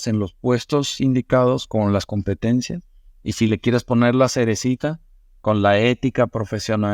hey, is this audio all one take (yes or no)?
yes